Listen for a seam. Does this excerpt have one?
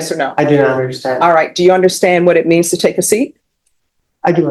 no; 0 cuts

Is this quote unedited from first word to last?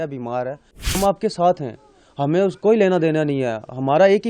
no; 1 cut; at 1.0 s

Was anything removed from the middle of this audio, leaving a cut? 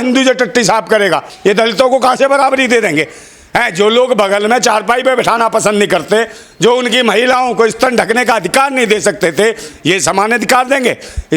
yes; 1 cut; at 1.3 s

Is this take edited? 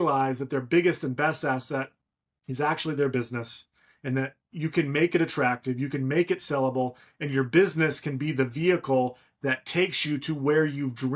no; 0 cuts

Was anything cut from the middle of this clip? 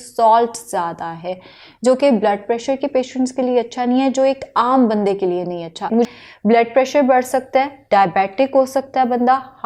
no; 0 cuts

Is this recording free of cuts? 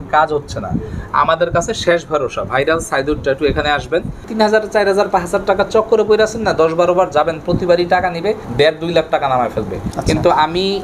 no; 2 cuts; at 4.3 s, 8.4 s

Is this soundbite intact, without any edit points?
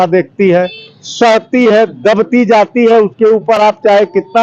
yes; 0 cuts

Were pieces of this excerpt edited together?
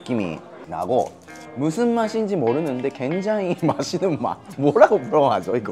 no; 0 cuts

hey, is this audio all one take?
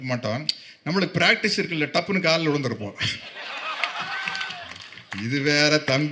yes; 0 cuts

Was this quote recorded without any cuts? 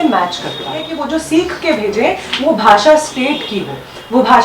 no; 1 cut; at 1.0 s

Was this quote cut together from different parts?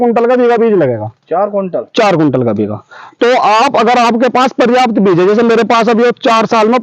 no; 0 cuts

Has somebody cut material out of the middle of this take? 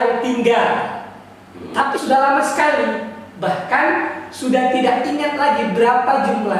yes; 1 cut; at 2.0 s

